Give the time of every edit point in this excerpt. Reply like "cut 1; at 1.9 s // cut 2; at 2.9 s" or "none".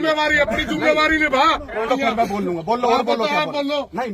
cut 1; at 1.9 s